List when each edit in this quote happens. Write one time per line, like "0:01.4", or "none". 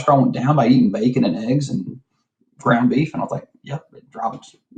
none